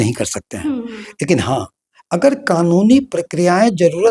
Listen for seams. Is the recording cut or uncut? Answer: uncut